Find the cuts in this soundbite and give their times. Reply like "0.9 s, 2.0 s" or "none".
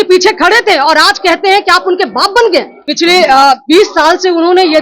2.8 s